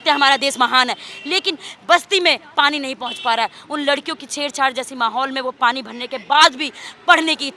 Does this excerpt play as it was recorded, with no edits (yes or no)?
yes